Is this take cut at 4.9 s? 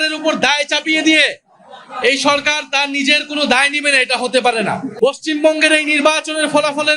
yes; 1 cut; at 4.9 s

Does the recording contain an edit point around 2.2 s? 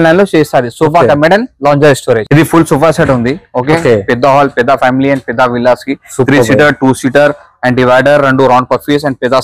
yes; 1 cut; at 2.2 s

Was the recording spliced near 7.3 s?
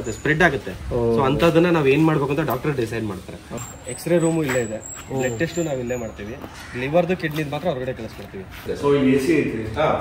no; 2 cuts; at 3.5 s, 8.7 s

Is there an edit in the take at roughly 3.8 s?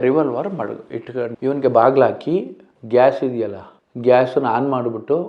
no; 1 cut; at 1.3 s

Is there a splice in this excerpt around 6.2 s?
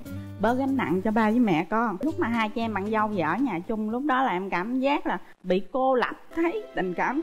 yes; 2 cuts; at 2.0 s, 6.2 s

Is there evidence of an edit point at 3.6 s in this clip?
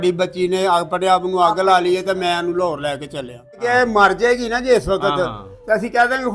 yes; 1 cut; at 3.6 s

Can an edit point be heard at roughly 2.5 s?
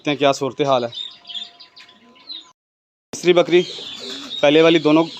yes; 1 cut; at 2.5 s

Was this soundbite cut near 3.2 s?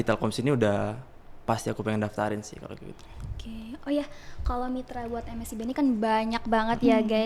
no; 0 cuts

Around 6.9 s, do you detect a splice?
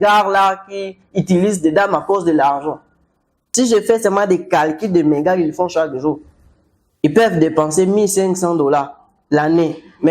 no; 1 cut; at 3.4 s

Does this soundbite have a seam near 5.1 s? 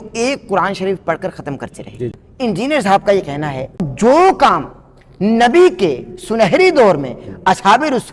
no; 2 cuts; at 2.2 s, 3.9 s

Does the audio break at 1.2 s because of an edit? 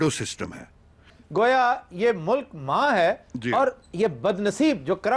yes; 1 cut; at 1.2 s

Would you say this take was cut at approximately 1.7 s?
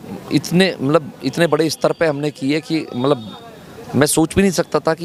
no; 0 cuts

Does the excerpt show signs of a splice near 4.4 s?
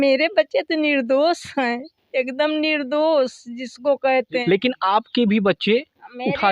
yes; 1 cut; at 4.4 s

